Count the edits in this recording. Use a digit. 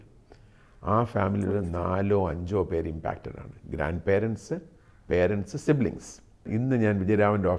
1